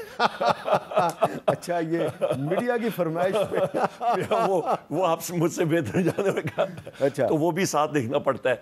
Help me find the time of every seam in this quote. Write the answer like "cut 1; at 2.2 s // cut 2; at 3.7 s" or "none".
none